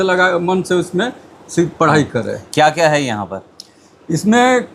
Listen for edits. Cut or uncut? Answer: uncut